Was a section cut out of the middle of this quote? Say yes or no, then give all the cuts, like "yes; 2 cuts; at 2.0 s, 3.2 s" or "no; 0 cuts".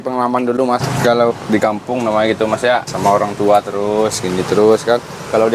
yes; 2 cuts; at 0.9 s, 2.9 s